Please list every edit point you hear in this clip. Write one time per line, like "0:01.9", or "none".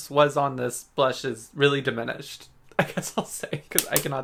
none